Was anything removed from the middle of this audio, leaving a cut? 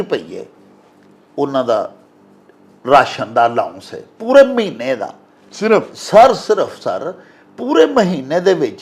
no; 0 cuts

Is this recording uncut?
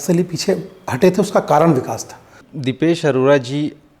no; 1 cut; at 2.5 s

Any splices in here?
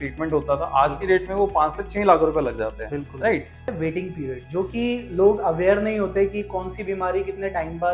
yes; 1 cut; at 3.7 s

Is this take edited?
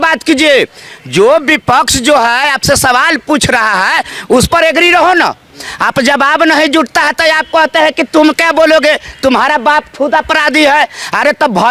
no; 0 cuts

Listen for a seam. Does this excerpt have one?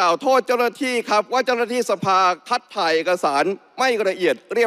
no; 0 cuts

